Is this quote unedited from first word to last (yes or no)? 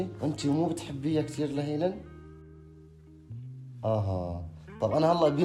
yes